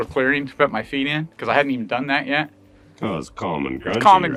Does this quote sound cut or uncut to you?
uncut